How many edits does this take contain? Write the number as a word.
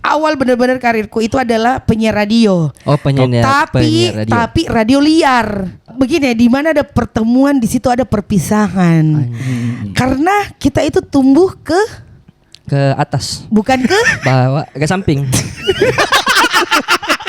one